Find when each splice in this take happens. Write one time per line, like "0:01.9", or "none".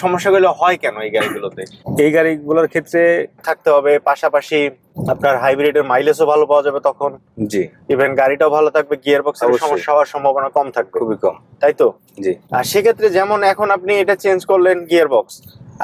0:03.5